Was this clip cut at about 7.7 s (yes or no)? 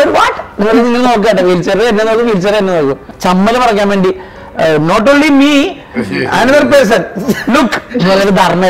no